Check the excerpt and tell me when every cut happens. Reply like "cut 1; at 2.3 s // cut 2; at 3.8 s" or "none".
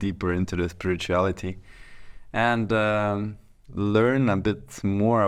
none